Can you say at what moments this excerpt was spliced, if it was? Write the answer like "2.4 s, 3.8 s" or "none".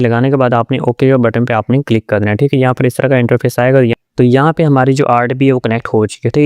3.9 s